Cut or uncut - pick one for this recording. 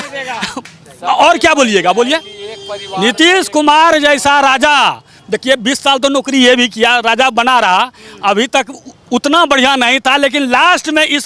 uncut